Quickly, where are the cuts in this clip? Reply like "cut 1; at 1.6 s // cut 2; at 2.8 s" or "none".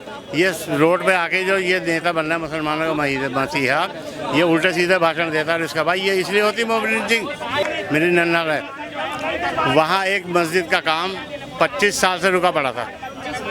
cut 1; at 7.7 s